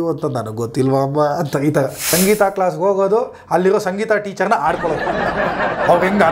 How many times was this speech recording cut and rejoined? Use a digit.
1